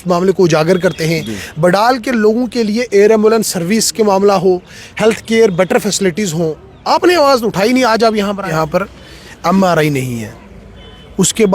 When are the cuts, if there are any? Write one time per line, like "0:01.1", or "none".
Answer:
0:08.5

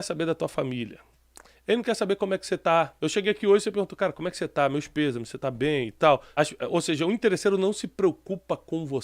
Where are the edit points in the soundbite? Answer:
0:02.9
0:06.3

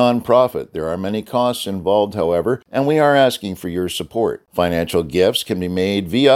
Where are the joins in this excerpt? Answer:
0:02.7

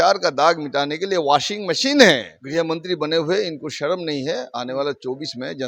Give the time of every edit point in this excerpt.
0:02.3

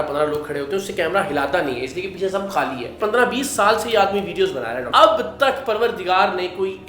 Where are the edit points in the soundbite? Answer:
0:03.0
0:04.9

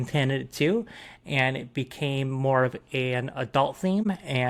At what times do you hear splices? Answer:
none

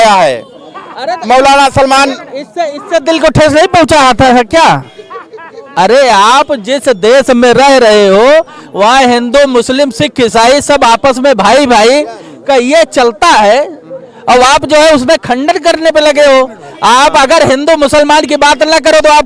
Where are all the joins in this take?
none

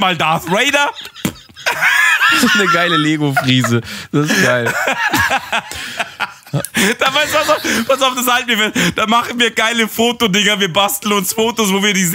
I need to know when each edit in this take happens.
none

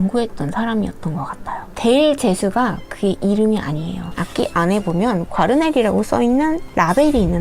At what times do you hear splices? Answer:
0:01.7
0:04.1

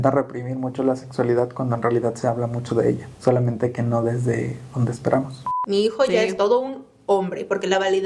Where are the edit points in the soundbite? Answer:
0:03.1
0:05.5

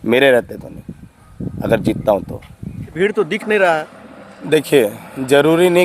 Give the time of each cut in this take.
0:02.8

